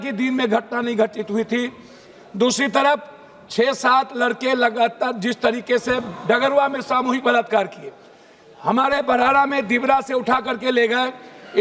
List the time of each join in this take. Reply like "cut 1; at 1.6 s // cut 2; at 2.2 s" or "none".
none